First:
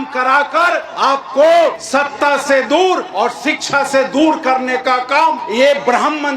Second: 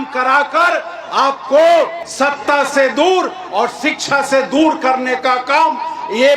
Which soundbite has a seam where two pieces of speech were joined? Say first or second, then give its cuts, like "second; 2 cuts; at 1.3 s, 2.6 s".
first; 4 cuts; at 0.9 s, 1.8 s, 3.1 s, 5.4 s